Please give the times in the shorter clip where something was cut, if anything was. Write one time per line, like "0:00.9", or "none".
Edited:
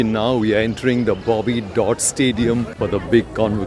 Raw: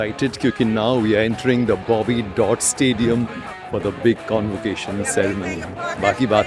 0:02.7